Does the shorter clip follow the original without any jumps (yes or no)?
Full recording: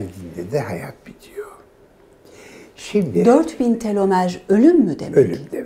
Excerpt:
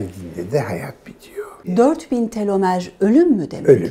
no